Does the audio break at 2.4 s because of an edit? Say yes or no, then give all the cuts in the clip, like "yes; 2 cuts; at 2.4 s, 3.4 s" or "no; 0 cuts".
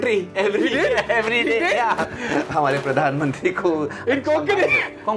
no; 0 cuts